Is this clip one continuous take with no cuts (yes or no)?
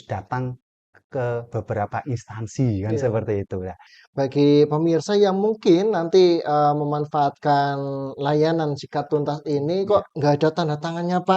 no